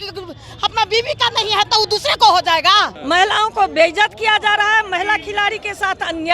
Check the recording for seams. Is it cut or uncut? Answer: cut